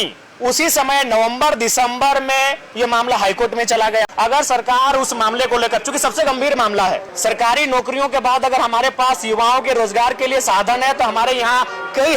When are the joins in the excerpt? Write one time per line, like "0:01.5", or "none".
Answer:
0:04.1
0:07.1